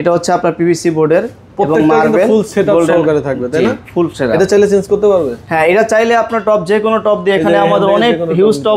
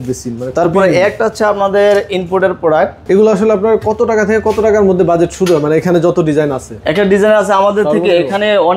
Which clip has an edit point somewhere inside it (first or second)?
second